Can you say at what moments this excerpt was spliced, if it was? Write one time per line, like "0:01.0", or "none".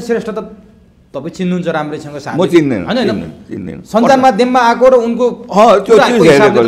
none

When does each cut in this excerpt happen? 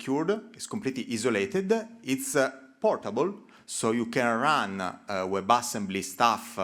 none

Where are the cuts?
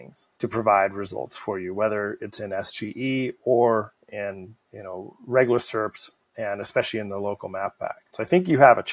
0:08.0

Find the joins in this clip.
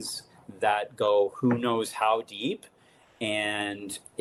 none

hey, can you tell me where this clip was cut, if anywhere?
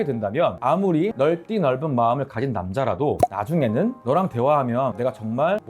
none

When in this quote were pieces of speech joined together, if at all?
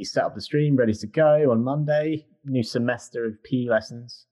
0:02.3

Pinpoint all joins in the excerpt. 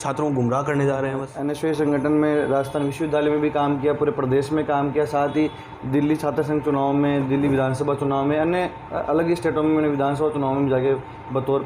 0:01.4

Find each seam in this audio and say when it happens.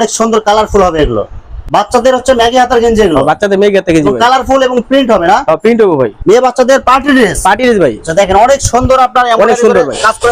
0:01.5
0:06.2

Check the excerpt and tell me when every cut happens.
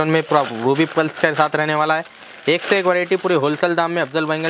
none

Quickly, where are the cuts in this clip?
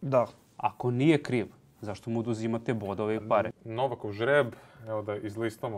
0:03.5

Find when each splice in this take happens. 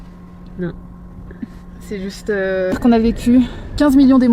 0:02.8

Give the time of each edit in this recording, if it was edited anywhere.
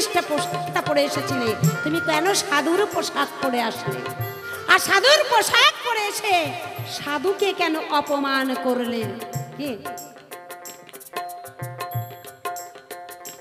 none

